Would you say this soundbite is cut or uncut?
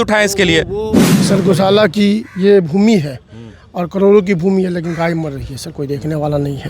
cut